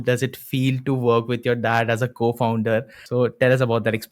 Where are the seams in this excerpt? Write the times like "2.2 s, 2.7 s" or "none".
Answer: 3.0 s

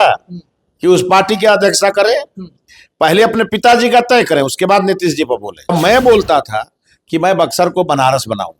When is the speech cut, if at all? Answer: 5.7 s

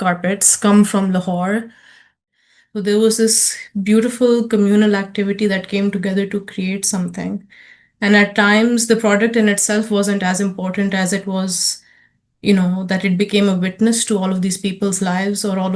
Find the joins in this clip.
2.3 s

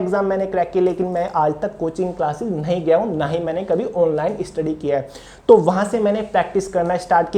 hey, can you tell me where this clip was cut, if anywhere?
none

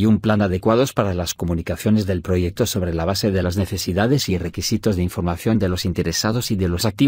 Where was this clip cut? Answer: 4.3 s

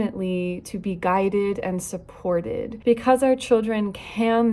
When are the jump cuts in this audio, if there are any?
2.7 s

